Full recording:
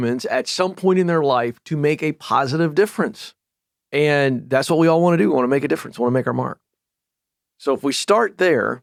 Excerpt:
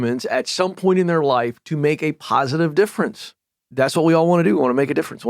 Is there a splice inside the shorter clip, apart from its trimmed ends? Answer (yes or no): yes